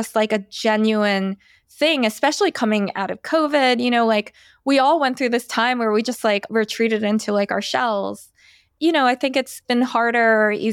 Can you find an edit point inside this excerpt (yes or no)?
yes